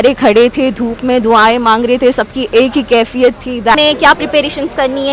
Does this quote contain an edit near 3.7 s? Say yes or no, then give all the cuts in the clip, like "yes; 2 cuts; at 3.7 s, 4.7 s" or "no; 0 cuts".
yes; 1 cut; at 3.7 s